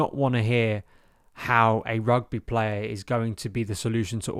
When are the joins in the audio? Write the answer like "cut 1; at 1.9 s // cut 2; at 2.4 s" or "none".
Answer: none